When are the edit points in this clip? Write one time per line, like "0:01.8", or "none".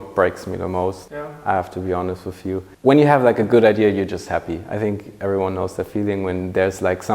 0:02.7